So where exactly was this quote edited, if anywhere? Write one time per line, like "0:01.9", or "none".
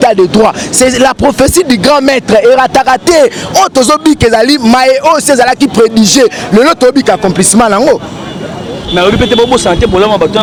none